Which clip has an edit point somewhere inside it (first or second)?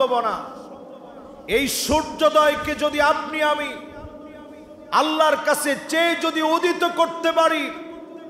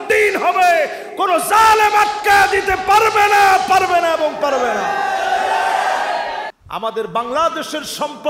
second